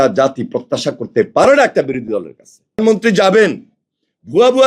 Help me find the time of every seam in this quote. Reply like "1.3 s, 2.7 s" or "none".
2.8 s